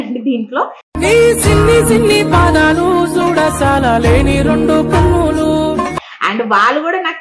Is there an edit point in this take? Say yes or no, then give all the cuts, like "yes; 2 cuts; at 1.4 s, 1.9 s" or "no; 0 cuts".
no; 0 cuts